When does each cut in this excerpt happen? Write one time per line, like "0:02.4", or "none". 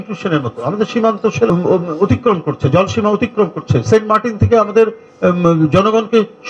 0:01.5